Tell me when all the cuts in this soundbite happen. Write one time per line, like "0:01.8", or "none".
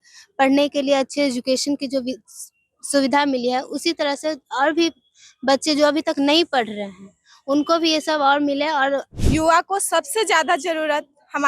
0:09.1